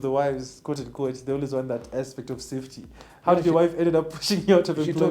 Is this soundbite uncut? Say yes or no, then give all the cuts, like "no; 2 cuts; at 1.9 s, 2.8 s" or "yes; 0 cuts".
yes; 0 cuts